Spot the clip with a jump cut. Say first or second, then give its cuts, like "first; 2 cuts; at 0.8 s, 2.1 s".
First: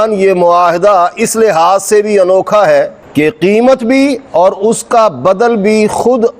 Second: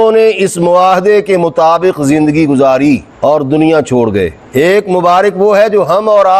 second; 1 cut; at 4.4 s